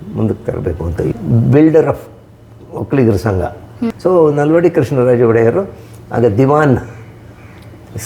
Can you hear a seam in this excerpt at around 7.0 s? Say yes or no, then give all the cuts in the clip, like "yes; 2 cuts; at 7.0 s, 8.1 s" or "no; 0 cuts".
no; 2 cuts; at 1.1 s, 3.9 s